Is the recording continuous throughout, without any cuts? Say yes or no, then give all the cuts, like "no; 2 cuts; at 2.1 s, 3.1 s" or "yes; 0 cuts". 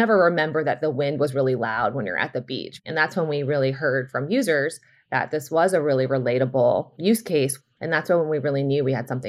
no; 2 cuts; at 2.7 s, 7.4 s